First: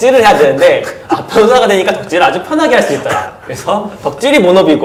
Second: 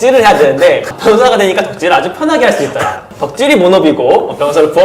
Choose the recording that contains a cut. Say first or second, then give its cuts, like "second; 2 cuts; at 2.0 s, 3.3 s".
second; 2 cuts; at 0.9 s, 3.1 s